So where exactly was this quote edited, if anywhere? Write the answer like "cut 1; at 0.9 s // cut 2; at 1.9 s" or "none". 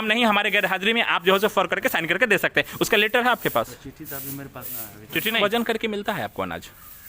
cut 1; at 5.4 s